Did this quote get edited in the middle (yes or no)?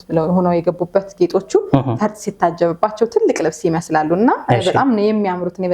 no